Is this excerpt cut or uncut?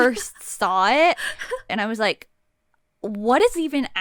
cut